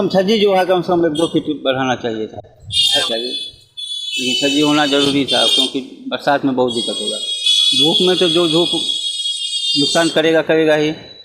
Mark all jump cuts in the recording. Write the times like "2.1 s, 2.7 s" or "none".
3.1 s